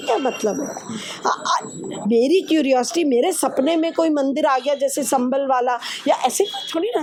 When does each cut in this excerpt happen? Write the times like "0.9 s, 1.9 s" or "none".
none